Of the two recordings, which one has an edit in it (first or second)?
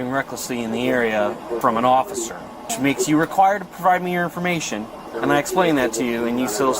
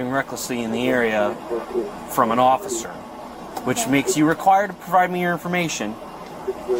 first